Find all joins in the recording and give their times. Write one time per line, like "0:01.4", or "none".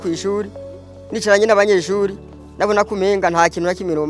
none